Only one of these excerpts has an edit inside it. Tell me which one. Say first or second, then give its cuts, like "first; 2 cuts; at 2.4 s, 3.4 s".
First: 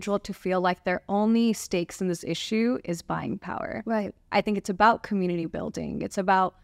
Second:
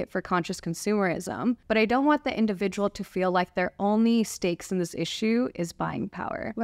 second; 1 cut; at 1.6 s